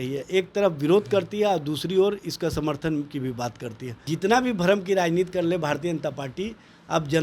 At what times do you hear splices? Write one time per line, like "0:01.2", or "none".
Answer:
0:04.0